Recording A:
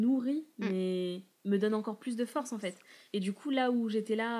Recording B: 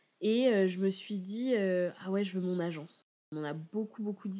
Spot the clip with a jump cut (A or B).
B